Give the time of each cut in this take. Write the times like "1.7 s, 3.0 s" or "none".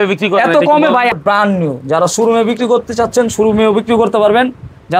1.1 s